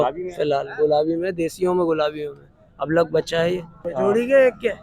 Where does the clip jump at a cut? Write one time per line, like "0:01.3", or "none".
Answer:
0:03.9